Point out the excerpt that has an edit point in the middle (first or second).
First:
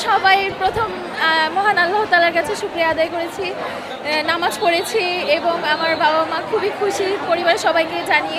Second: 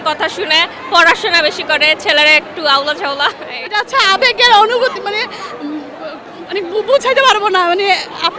second